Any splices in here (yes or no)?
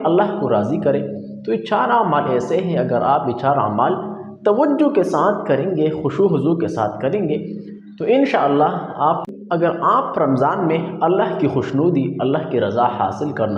yes